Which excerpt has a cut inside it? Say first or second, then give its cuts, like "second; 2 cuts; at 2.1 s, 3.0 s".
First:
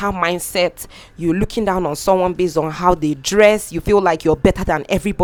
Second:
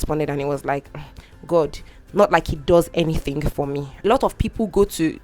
second; 1 cut; at 3.9 s